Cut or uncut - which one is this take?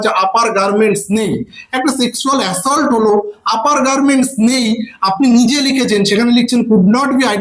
uncut